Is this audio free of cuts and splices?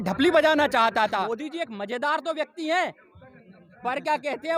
no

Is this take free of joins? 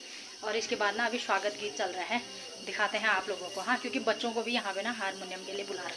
yes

